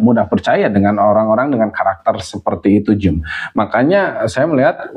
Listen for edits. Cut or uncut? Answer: uncut